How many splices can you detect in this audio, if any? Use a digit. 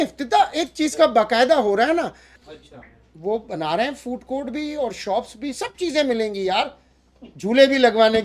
1